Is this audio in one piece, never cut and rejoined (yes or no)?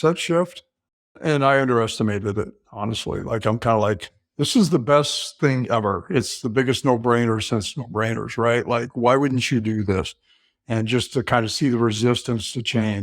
no